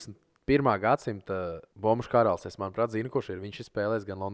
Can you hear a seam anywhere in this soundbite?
yes; 1 cut; at 1.6 s

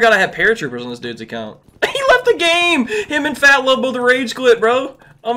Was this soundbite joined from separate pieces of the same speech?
yes; 1 cut; at 1.6 s

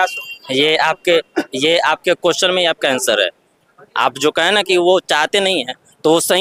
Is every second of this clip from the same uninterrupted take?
yes; 0 cuts

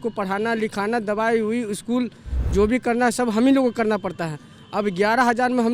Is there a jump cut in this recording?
no; 0 cuts

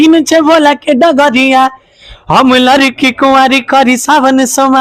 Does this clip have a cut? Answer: no; 0 cuts

